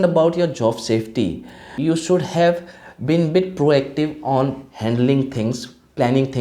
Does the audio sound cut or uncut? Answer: cut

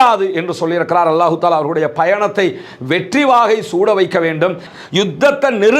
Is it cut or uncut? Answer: cut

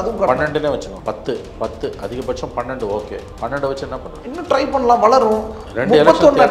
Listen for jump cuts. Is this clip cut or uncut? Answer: cut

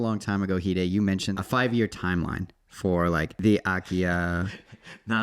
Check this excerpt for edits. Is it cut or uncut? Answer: cut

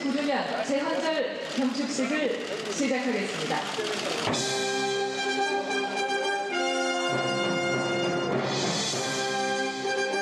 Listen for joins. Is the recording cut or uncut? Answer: uncut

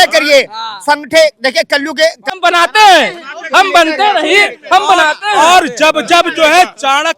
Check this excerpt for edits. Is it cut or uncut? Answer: cut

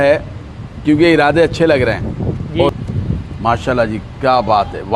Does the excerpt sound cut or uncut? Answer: cut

